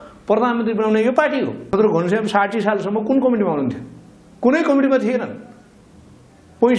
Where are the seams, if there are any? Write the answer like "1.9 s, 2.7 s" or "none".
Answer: 1.7 s